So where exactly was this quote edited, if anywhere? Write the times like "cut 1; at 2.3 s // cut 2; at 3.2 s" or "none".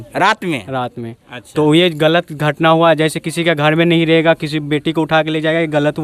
none